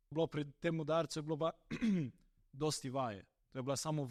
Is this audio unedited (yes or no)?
yes